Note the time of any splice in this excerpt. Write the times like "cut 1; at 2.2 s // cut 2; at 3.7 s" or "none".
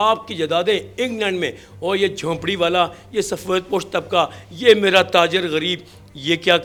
none